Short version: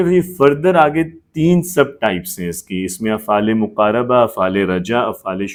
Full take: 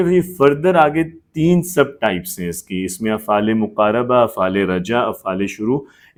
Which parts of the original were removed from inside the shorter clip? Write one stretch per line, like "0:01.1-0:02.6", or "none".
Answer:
none